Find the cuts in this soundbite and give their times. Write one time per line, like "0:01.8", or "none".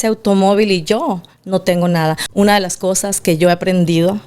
0:02.2